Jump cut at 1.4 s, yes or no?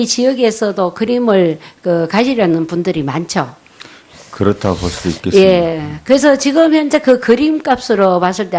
yes